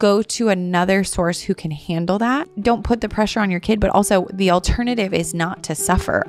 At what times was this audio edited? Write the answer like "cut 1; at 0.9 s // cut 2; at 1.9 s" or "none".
cut 1; at 2.5 s